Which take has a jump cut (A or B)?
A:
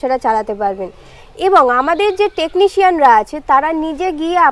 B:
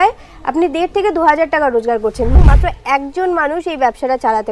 B